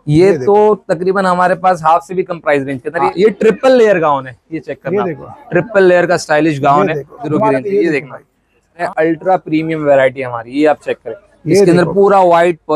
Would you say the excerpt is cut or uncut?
cut